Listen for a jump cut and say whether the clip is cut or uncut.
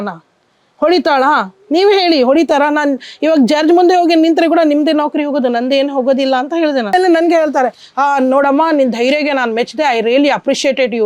cut